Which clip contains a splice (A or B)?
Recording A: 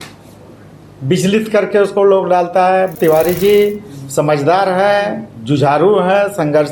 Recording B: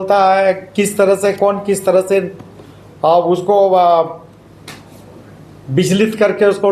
A